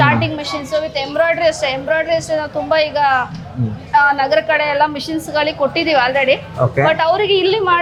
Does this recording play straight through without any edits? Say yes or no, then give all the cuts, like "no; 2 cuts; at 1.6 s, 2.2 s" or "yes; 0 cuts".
yes; 0 cuts